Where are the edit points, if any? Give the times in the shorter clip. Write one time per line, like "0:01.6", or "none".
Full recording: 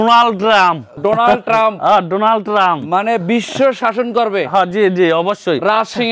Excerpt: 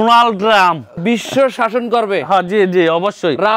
0:01.0